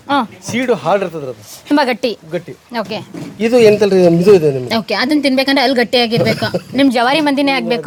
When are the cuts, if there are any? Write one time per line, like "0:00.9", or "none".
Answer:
none